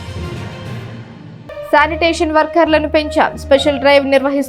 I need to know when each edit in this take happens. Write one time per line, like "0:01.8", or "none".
0:01.0